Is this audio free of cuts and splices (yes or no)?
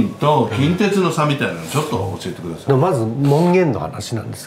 yes